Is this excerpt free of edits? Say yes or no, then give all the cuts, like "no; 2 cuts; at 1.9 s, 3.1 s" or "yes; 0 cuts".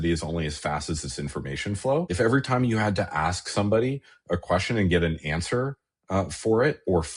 no; 1 cut; at 2.1 s